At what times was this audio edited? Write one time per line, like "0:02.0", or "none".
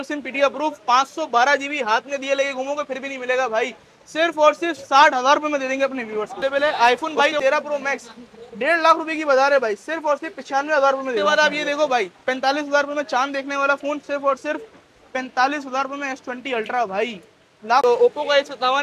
0:06.4
0:11.2
0:17.8